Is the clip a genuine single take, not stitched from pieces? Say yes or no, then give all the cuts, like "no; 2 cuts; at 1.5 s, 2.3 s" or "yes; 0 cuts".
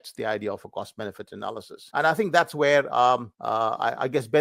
no; 2 cuts; at 1.7 s, 3.3 s